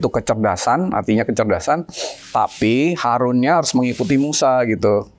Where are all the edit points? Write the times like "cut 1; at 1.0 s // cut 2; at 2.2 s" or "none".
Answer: none